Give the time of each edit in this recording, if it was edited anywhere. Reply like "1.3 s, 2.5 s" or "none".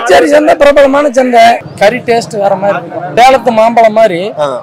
1.6 s, 3.0 s